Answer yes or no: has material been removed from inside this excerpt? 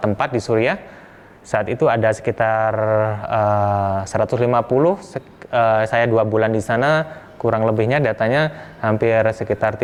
no